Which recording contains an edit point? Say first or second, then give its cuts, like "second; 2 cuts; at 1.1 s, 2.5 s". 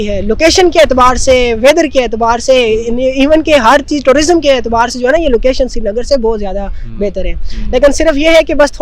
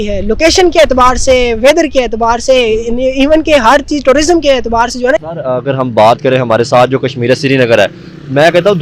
second; 1 cut; at 5.2 s